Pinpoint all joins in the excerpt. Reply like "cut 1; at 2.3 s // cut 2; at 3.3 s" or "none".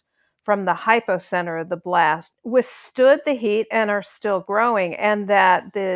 cut 1; at 2.3 s